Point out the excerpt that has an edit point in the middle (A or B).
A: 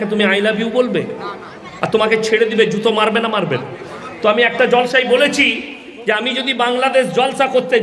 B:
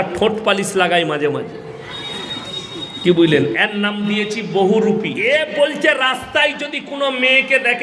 B